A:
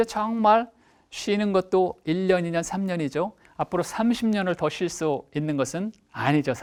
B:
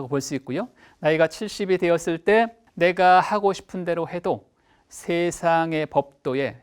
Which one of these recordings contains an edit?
B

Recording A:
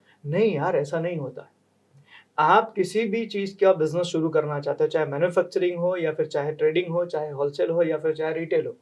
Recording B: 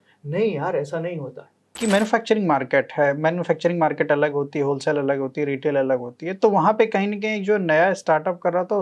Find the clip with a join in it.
B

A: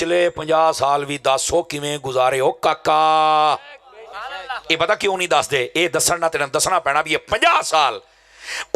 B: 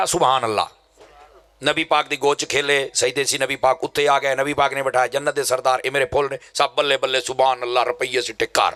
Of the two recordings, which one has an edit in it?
A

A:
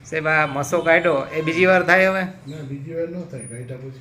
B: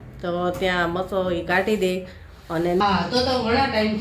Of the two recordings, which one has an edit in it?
B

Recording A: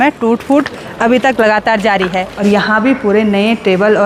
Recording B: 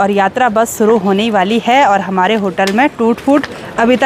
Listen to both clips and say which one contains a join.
A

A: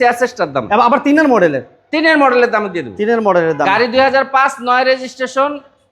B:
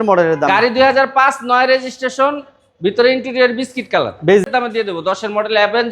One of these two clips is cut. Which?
B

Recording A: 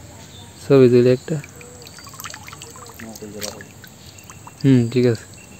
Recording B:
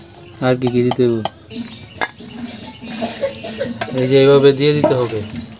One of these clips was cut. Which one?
B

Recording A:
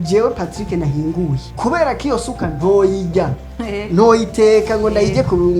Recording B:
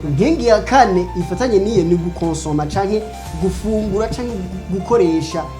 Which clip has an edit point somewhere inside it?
A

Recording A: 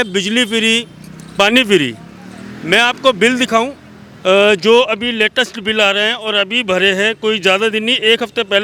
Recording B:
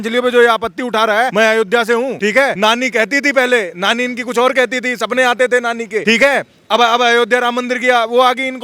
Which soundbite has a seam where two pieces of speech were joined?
B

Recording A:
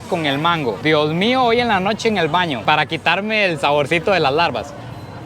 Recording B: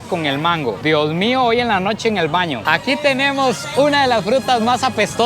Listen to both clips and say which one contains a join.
B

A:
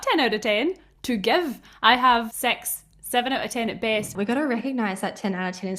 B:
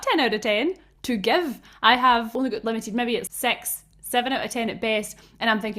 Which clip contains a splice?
A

